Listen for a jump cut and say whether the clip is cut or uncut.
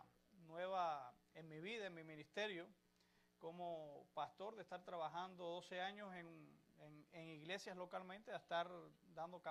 uncut